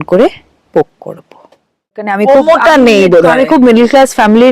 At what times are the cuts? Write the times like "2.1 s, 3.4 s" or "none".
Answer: 2.1 s